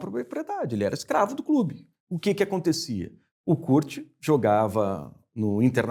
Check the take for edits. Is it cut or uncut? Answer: uncut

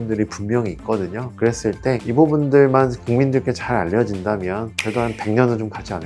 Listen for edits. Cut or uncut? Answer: uncut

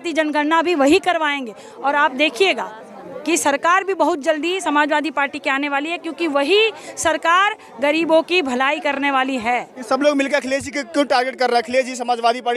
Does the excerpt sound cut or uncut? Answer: uncut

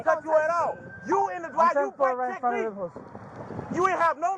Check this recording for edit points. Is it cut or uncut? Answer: uncut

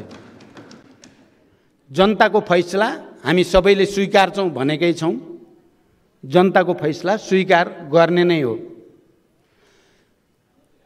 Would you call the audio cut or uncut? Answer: uncut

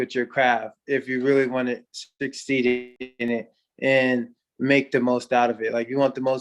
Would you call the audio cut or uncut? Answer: cut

